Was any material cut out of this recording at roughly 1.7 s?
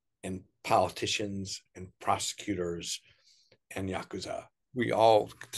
no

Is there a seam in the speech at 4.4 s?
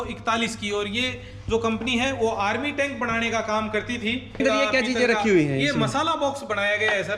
yes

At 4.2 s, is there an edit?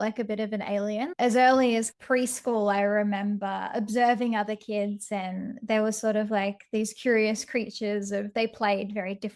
no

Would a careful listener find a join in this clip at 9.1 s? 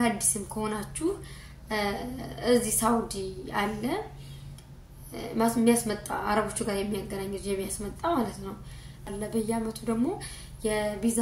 yes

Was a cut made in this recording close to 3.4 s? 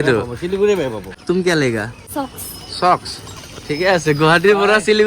no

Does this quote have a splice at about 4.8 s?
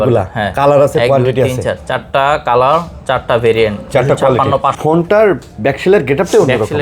yes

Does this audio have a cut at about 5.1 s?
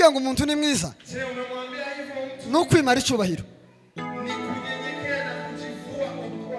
no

